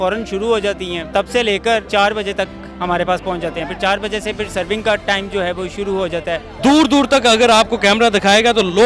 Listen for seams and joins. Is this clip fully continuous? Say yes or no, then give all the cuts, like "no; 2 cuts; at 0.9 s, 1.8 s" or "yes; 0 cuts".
no; 3 cuts; at 1.0 s, 1.9 s, 6.5 s